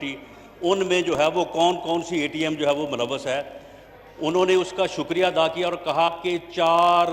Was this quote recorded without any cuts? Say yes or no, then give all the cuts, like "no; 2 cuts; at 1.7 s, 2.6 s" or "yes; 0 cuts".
yes; 0 cuts